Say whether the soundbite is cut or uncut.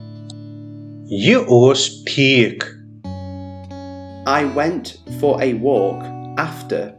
uncut